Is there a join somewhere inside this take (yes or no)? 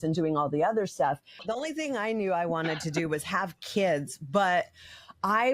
yes